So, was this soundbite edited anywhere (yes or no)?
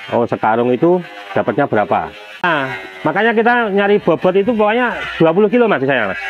yes